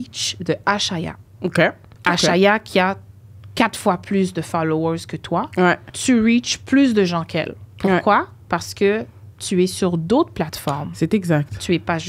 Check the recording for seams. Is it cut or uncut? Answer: cut